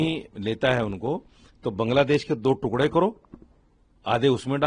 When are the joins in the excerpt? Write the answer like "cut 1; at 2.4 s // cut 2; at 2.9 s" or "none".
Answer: none